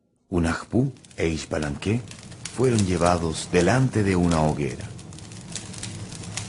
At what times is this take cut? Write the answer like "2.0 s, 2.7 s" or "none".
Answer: none